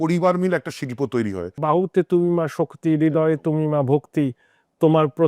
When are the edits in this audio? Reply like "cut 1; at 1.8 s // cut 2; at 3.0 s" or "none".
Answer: cut 1; at 1.6 s